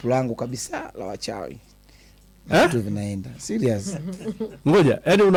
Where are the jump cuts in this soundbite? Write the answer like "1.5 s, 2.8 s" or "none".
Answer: none